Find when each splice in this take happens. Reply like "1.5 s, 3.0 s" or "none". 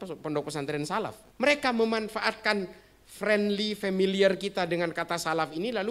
1.2 s